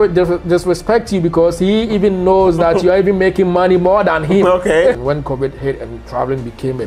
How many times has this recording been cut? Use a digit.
1